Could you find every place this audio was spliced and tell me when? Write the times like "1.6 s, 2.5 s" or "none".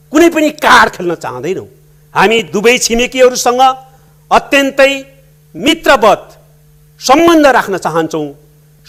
none